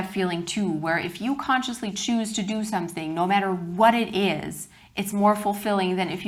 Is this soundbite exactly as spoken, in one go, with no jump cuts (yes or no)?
yes